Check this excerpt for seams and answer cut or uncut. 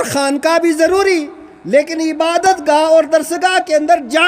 uncut